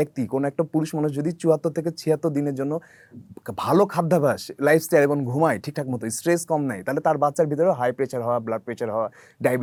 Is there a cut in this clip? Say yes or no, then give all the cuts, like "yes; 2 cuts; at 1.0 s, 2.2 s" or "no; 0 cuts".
no; 0 cuts